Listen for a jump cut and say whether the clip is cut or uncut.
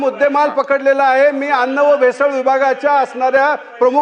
uncut